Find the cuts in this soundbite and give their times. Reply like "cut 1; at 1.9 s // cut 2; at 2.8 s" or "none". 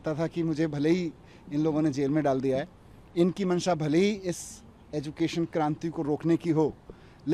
none